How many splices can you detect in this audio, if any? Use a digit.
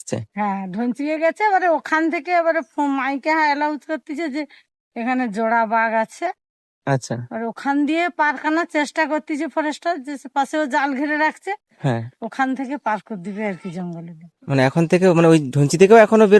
0